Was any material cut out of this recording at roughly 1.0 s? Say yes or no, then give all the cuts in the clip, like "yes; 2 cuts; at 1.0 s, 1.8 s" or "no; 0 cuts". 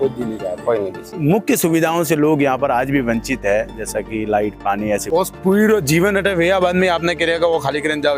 yes; 2 cuts; at 1.0 s, 5.0 s